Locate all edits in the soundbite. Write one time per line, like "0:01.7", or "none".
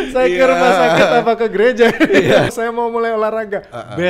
0:02.5